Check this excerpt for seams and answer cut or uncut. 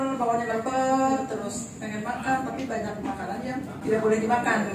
cut